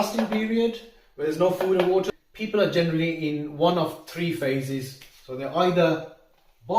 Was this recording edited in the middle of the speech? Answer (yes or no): yes